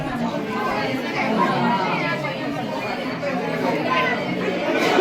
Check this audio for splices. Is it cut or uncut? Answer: uncut